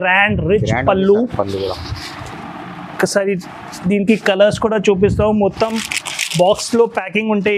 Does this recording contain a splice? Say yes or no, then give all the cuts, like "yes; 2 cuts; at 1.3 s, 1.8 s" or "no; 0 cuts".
no; 0 cuts